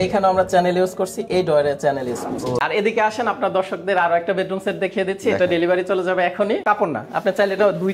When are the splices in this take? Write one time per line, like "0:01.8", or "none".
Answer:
0:02.6
0:06.6